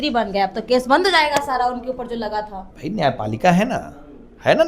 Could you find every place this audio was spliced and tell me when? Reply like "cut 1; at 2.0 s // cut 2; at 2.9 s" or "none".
cut 1; at 2.6 s